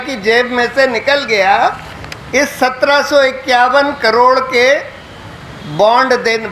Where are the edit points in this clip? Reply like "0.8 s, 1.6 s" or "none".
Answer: none